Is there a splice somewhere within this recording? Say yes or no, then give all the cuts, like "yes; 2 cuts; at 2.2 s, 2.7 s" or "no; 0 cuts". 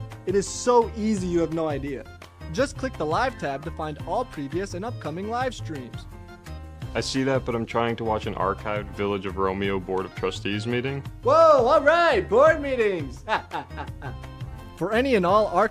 no; 0 cuts